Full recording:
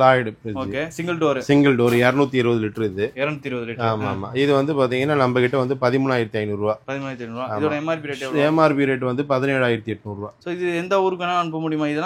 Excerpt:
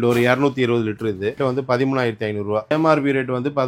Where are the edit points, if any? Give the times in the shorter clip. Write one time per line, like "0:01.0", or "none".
0:01.4
0:02.7